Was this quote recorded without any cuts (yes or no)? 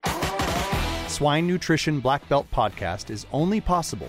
no